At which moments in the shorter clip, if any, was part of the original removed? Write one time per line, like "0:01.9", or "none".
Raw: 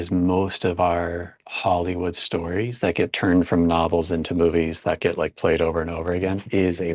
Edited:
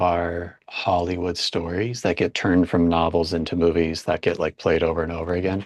none